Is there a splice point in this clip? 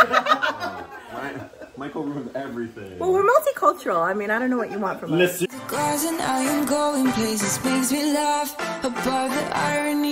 yes; 1 cut; at 5.5 s

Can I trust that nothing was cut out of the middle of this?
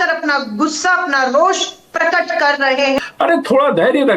no; 1 cut; at 3.0 s

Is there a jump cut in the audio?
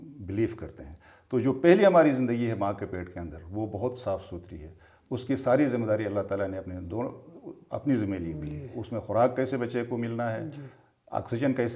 no; 0 cuts

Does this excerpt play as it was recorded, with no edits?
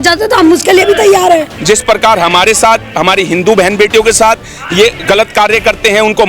no; 2 cuts; at 1.5 s, 5.0 s

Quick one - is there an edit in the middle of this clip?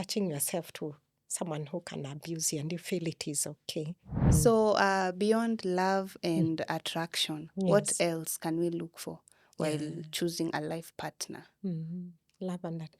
yes; 1 cut; at 4.3 s

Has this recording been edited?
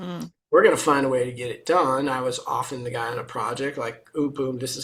no; 0 cuts

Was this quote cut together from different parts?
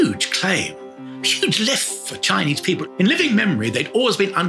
yes; 1 cut; at 2.8 s

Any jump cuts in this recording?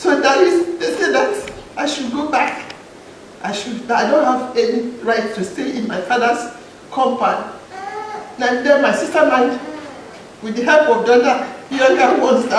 yes; 1 cut; at 1.6 s

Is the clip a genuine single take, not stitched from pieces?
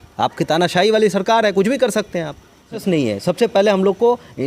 no; 1 cut; at 2.8 s

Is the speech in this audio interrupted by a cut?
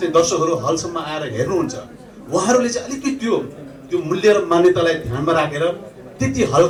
no; 0 cuts

